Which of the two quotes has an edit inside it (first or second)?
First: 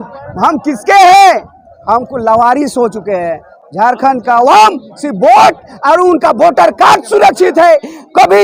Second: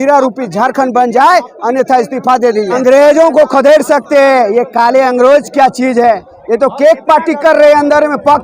second